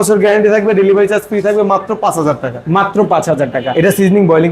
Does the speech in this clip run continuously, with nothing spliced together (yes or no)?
yes